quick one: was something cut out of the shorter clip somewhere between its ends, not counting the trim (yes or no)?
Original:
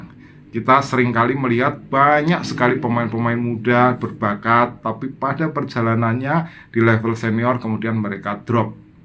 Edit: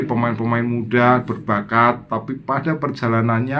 no